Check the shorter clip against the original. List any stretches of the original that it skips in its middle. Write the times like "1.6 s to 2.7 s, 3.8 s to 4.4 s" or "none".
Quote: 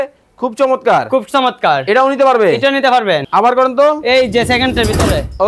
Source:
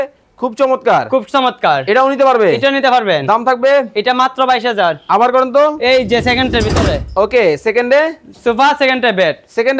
3.2 s to 5.0 s